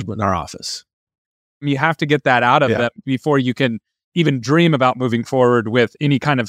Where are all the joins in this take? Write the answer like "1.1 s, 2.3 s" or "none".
1.6 s